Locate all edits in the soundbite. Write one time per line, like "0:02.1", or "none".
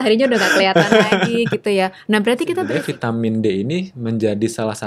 0:02.7